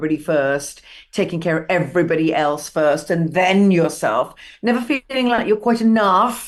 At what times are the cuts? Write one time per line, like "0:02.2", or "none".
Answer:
none